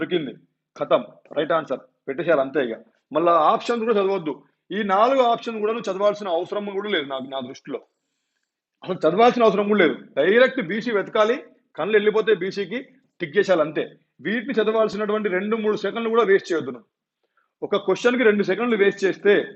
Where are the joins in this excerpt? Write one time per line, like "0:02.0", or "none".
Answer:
none